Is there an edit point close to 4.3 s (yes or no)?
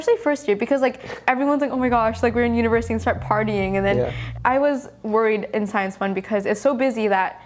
yes